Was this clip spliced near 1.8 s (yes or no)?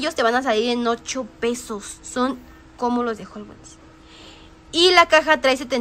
no